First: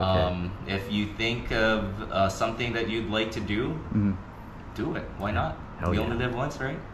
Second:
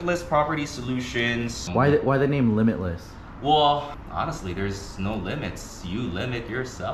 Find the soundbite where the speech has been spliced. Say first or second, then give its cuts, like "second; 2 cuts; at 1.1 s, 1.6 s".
second; 2 cuts; at 1.7 s, 4.0 s